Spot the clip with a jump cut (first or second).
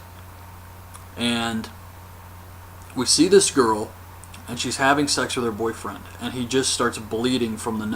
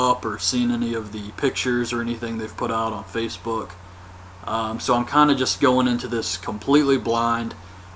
second